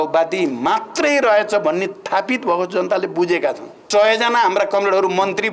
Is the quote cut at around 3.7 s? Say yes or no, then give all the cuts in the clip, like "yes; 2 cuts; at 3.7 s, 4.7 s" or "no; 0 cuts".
yes; 1 cut; at 3.7 s